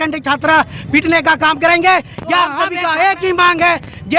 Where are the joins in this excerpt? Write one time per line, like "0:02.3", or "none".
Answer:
0:02.6